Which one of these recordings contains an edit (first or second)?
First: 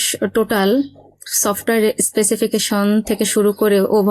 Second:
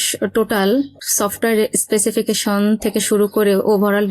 second